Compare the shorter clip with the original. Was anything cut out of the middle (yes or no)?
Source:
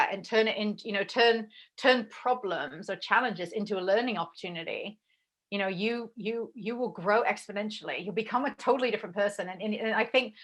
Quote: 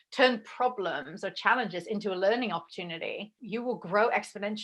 yes